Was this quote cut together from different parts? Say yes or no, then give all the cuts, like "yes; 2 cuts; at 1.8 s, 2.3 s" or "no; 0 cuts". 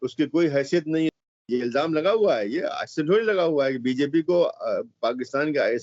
yes; 1 cut; at 1.1 s